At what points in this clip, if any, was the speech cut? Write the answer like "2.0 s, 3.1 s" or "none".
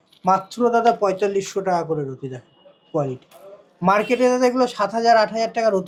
none